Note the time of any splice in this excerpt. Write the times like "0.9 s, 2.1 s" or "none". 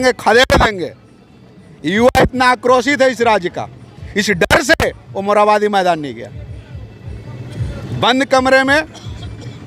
none